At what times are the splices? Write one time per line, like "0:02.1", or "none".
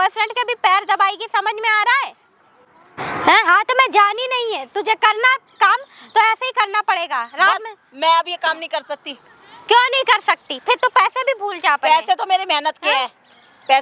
none